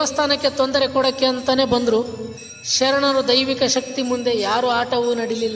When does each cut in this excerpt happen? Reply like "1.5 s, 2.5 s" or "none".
none